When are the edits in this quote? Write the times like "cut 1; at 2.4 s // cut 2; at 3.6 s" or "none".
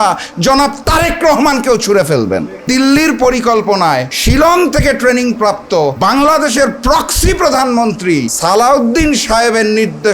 cut 1; at 2.7 s // cut 2; at 4.1 s // cut 3; at 6.0 s // cut 4; at 8.3 s

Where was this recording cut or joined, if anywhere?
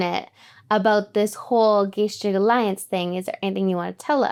none

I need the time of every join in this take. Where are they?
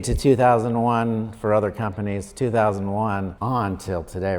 cut 1; at 3.3 s

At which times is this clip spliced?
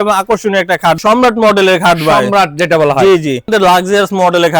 cut 1; at 1.0 s // cut 2; at 3.5 s

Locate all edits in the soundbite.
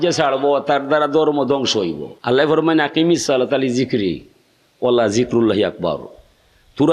cut 1; at 2.1 s

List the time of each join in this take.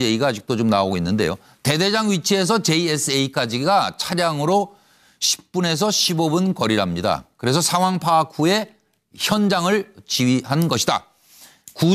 cut 1; at 6.9 s

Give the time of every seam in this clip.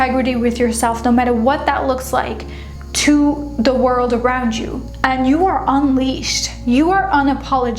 cut 1; at 4.9 s

